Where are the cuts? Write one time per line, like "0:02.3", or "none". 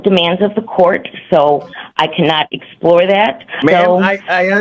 0:03.6